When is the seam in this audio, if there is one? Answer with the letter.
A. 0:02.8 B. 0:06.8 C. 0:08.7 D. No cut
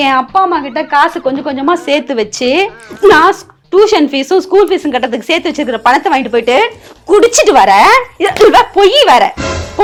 D